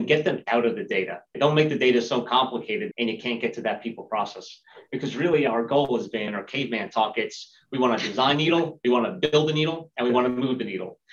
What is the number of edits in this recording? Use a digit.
1